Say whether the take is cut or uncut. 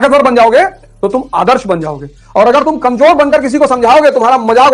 uncut